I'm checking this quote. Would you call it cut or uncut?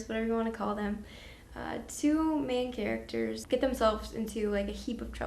cut